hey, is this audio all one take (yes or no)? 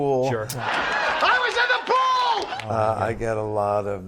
no